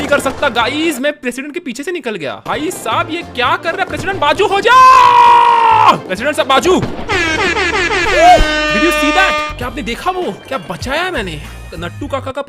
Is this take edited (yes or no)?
no